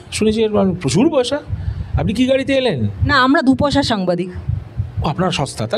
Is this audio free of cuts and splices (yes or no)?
yes